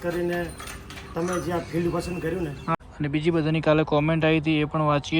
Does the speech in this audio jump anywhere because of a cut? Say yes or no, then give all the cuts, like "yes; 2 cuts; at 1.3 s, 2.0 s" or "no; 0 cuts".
yes; 1 cut; at 2.8 s